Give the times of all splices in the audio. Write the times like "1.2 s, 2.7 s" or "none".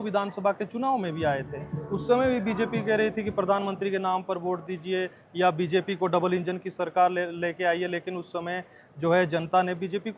none